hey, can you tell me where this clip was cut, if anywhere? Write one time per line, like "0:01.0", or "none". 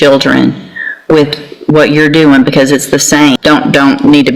0:03.4